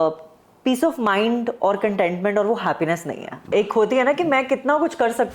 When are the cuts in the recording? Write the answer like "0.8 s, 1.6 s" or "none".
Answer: 3.5 s